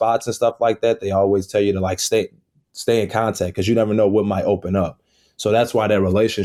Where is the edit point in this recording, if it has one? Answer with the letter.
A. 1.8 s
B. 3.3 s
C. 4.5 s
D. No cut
D